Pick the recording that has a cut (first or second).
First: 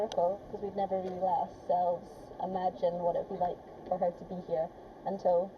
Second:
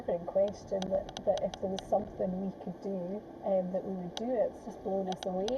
second